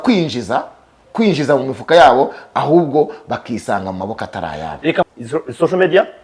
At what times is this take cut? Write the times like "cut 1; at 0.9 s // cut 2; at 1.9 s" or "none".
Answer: cut 1; at 5.1 s